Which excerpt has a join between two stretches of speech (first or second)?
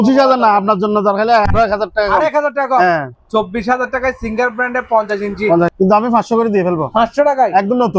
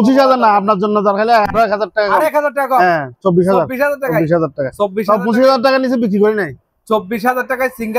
first